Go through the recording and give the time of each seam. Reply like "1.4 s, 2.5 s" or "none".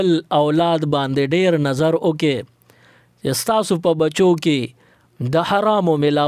none